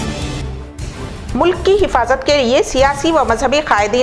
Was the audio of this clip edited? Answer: yes; 1 cut; at 1.0 s

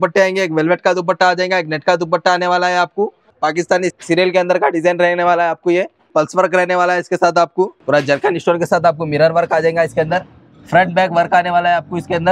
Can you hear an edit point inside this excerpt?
yes; 3 cuts; at 3.3 s, 6.1 s, 7.8 s

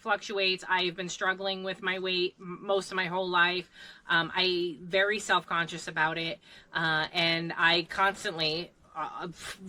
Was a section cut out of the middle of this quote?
no; 0 cuts

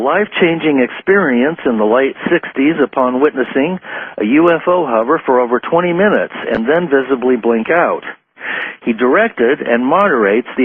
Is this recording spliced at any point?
no; 0 cuts

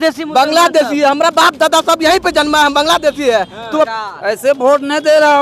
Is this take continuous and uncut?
no; 1 cut; at 3.9 s

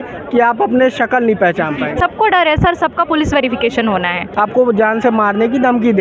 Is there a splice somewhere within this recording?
yes; 2 cuts; at 2.0 s, 4.2 s

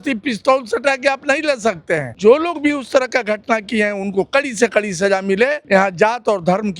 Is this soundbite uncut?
no; 2 cuts; at 2.1 s, 5.6 s

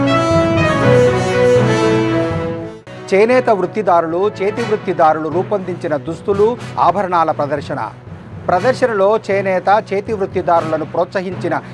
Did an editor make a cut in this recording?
yes; 1 cut; at 2.6 s

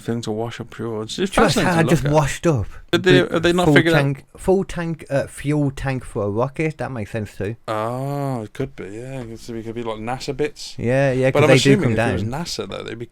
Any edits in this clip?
yes; 1 cut; at 2.7 s

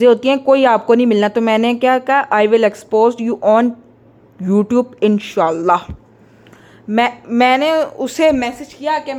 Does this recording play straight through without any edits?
yes; 0 cuts

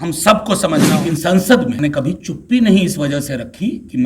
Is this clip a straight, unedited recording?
no; 2 cuts; at 0.9 s, 1.8 s

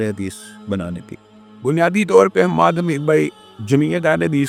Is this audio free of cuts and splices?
yes; 0 cuts

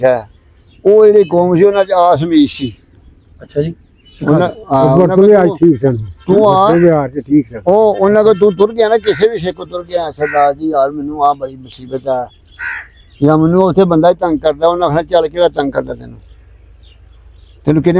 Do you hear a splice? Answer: no; 0 cuts

